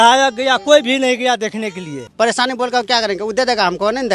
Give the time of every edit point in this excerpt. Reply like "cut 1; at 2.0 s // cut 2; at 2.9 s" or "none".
cut 1; at 2.0 s